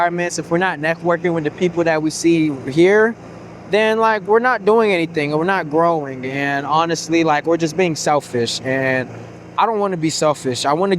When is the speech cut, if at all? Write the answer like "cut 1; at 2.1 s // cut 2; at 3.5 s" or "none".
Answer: none